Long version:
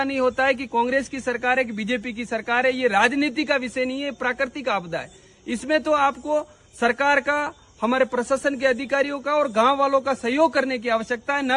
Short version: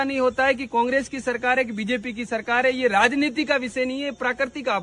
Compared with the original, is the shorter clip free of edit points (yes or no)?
yes